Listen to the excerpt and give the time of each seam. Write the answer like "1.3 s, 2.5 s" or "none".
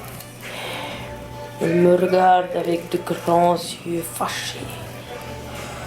4.7 s

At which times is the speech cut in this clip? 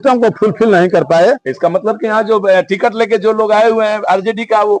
2.1 s

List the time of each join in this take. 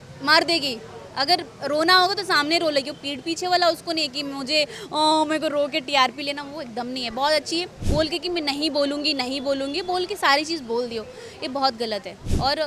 7.8 s

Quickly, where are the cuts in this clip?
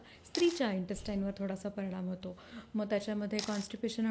none

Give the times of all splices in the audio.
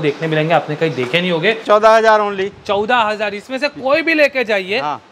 1.6 s

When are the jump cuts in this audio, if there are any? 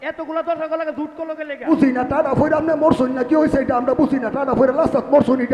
1.7 s

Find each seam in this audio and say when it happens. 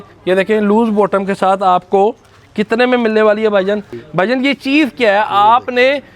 4.0 s

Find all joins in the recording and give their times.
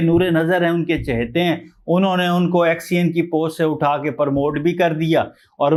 none

